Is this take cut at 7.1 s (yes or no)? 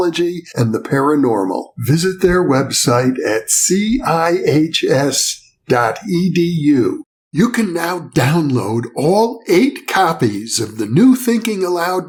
no